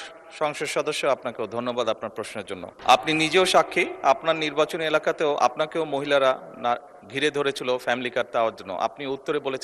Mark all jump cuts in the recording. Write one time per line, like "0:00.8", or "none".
0:02.7